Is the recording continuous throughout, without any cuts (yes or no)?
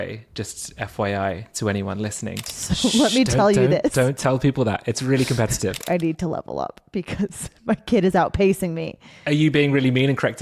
no